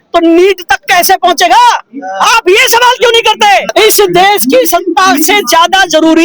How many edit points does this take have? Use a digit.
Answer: 1